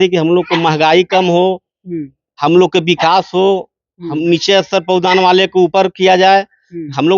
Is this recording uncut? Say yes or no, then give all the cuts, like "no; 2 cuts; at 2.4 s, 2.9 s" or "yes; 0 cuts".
yes; 0 cuts